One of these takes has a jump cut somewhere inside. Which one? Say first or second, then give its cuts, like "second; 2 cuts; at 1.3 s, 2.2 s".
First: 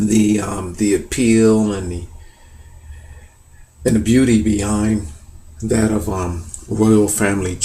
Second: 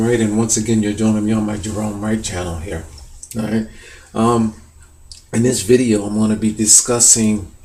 first; 1 cut; at 2.4 s